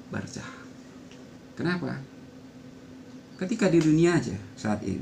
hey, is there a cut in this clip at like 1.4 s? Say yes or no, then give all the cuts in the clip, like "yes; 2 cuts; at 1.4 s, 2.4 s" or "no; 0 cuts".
yes; 1 cut; at 1.4 s